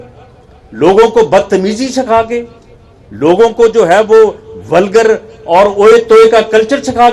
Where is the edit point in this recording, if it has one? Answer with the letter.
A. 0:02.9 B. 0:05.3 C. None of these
C